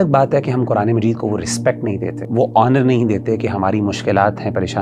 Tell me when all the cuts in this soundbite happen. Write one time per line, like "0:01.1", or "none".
0:02.2